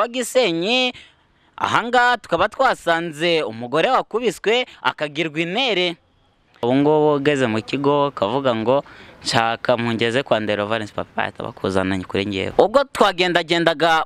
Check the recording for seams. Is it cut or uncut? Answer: cut